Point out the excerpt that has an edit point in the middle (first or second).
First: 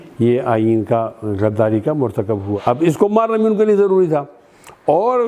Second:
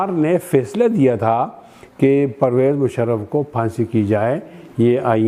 first